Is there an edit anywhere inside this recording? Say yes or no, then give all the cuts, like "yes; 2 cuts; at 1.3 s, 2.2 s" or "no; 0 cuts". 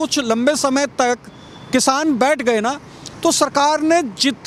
no; 0 cuts